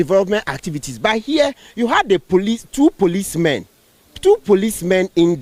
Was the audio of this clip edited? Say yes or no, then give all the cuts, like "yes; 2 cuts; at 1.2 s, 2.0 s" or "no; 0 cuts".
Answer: no; 0 cuts